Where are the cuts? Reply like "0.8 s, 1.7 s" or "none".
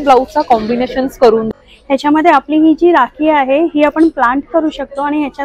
1.5 s